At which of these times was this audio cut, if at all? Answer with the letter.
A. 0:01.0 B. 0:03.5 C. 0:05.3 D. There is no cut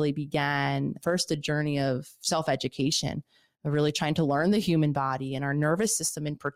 A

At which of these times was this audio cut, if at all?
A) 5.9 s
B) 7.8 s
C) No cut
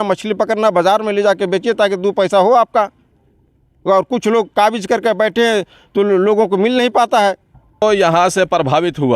B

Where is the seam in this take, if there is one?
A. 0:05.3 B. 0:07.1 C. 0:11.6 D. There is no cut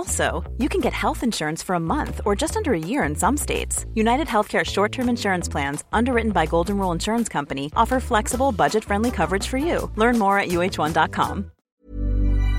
C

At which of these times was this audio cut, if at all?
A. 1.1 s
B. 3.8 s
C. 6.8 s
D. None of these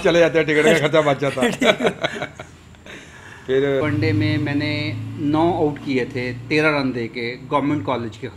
B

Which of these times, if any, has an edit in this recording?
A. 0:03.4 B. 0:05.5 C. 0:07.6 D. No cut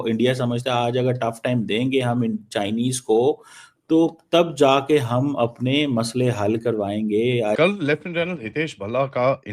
C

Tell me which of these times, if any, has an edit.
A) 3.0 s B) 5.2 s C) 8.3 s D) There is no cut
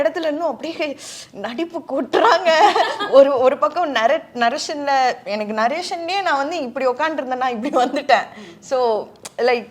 D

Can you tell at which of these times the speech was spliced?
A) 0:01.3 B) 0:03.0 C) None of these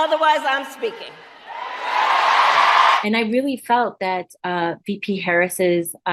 B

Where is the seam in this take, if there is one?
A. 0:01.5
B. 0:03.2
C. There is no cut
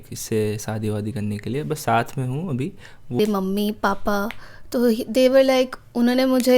B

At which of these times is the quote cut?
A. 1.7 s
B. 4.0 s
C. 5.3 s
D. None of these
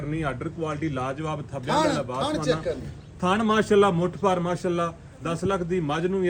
D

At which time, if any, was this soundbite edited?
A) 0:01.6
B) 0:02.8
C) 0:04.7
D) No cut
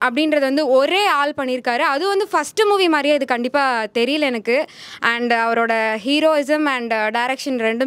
D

